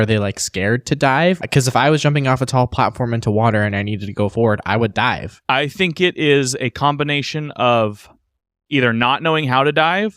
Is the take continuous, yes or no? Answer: no